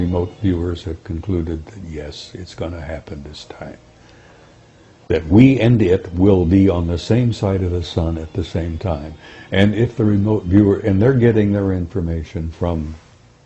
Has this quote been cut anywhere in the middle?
no; 0 cuts

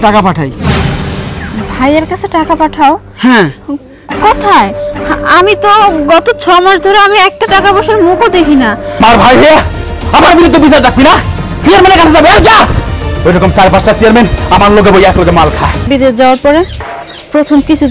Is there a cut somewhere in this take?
yes; 2 cuts; at 9.0 s, 15.9 s

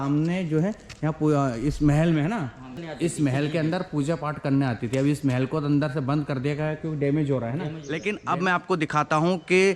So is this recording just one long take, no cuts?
no; 2 cuts; at 2.8 s, 7.9 s

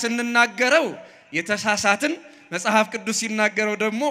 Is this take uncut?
yes; 0 cuts

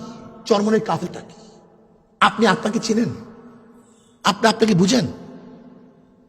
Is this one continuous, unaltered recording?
no; 1 cut; at 1.0 s

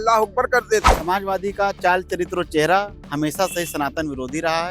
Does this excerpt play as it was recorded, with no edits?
no; 1 cut; at 0.9 s

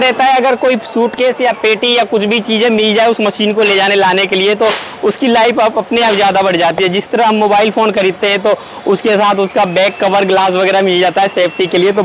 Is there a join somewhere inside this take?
no; 0 cuts

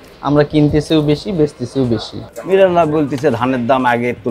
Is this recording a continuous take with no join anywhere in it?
no; 1 cut; at 2.1 s

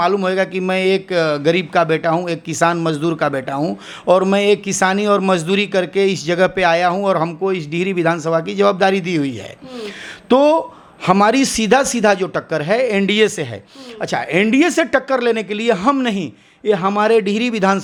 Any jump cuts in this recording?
no; 0 cuts

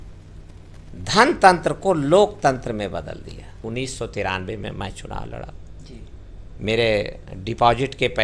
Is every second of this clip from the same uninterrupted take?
no; 1 cut; at 3.6 s

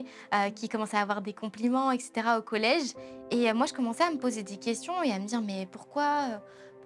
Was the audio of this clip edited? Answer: no; 0 cuts

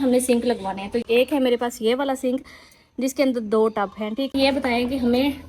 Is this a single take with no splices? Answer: no; 2 cuts; at 1.0 s, 4.3 s

